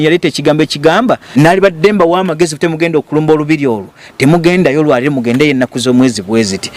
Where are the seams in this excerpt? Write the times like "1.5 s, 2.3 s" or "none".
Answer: 1.2 s